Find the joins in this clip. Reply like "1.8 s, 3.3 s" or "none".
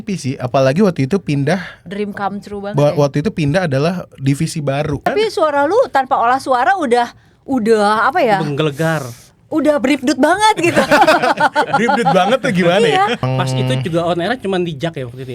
5.0 s, 13.2 s